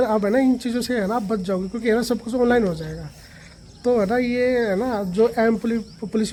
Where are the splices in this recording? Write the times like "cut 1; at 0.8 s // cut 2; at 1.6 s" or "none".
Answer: none

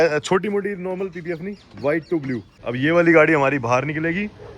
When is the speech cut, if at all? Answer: cut 1; at 2.5 s

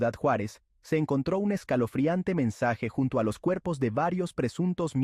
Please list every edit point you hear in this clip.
none

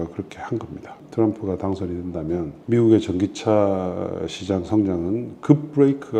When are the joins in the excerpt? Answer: cut 1; at 1.0 s // cut 2; at 2.6 s

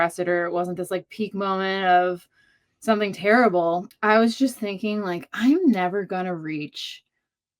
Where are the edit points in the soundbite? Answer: cut 1; at 3.9 s

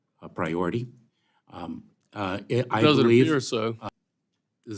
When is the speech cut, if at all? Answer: cut 1; at 3.8 s

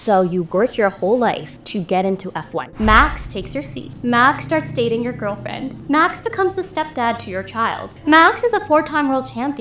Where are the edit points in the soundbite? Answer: cut 1; at 1.5 s // cut 2; at 2.6 s // cut 3; at 3.8 s // cut 4; at 5.7 s // cut 5; at 7.9 s

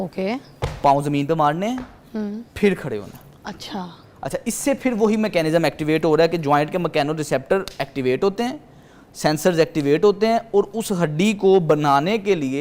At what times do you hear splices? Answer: none

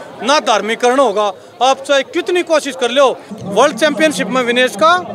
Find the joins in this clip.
cut 1; at 3.3 s

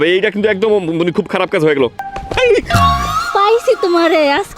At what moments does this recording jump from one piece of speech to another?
cut 1; at 2.0 s

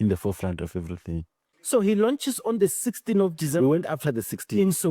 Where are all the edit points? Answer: cut 1; at 1.5 s

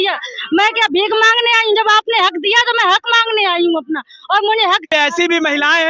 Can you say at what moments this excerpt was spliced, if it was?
cut 1; at 4.9 s

